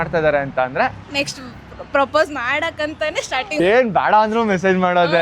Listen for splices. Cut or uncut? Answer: cut